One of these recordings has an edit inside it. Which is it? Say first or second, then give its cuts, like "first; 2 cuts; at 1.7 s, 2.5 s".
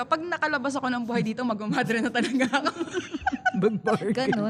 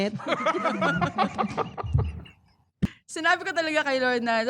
second; 1 cut; at 2.9 s